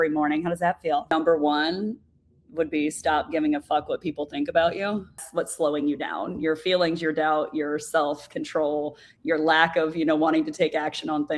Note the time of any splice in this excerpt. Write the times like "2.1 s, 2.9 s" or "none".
1.1 s, 5.2 s